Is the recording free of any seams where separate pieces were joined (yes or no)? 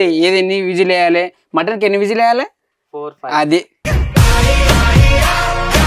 yes